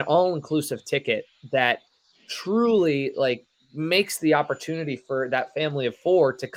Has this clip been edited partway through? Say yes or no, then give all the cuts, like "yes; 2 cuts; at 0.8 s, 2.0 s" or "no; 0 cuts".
no; 0 cuts